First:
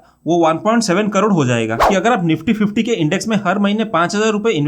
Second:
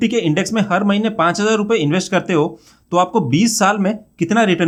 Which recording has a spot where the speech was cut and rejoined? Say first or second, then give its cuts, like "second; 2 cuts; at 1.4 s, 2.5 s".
first; 1 cut; at 1.8 s